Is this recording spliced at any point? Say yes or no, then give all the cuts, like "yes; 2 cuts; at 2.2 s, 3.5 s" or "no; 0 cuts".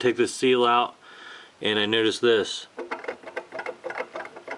no; 0 cuts